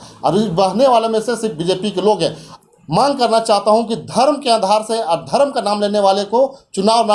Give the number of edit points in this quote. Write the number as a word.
one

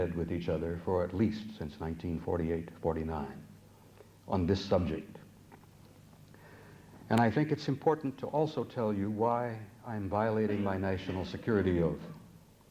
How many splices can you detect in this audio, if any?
one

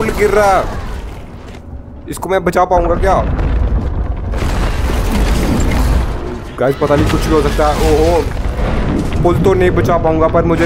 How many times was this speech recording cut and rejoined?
zero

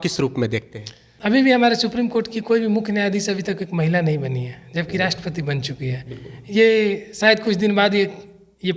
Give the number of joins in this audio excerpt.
one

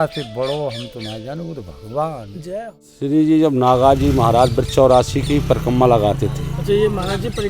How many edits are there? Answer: one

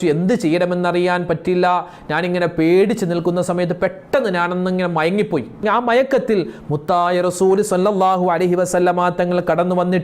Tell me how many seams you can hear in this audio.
one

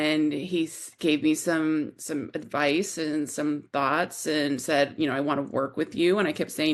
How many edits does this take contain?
zero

